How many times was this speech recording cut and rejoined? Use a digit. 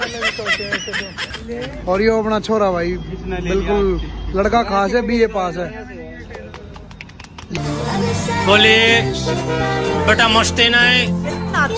1